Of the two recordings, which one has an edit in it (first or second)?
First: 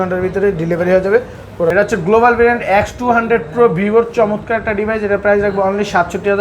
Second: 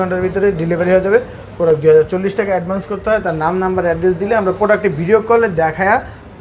first